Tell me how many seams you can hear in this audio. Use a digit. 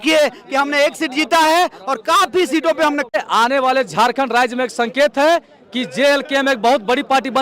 1